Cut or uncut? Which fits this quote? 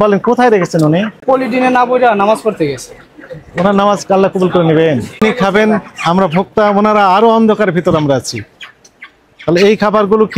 cut